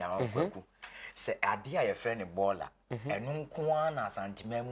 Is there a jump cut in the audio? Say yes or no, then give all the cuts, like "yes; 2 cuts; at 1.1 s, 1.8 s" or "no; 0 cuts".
no; 0 cuts